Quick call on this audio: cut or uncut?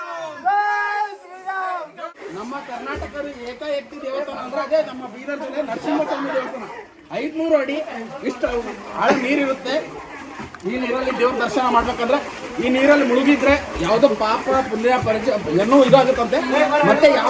cut